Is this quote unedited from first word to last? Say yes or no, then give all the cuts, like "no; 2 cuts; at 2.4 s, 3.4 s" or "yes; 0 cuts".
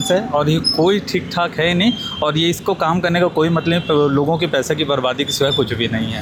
yes; 0 cuts